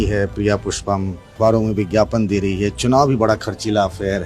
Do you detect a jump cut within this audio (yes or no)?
yes